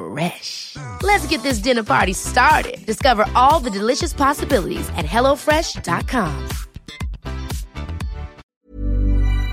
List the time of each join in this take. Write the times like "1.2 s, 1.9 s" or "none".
8.4 s